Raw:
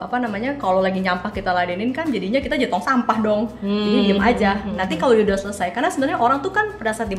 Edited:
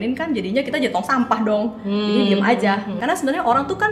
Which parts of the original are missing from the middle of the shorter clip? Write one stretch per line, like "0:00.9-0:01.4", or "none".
0:04.8-0:05.7